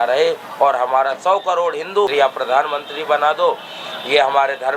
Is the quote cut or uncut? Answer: cut